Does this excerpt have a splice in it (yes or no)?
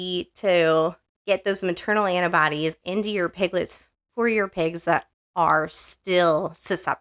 no